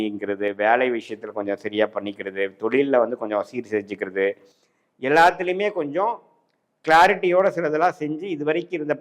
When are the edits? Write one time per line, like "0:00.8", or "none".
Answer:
none